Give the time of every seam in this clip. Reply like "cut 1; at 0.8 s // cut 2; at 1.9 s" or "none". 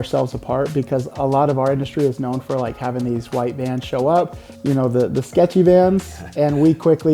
cut 1; at 4.4 s